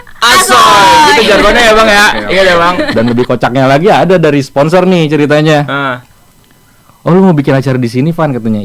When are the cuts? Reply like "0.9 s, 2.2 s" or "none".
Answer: 2.9 s